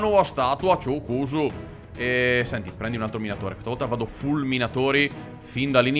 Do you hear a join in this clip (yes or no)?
no